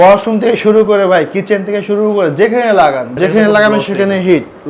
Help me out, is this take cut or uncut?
cut